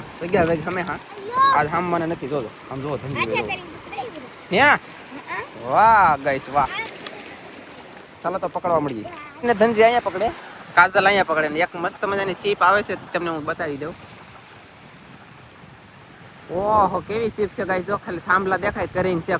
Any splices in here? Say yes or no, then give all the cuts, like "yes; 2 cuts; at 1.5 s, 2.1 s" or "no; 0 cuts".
no; 0 cuts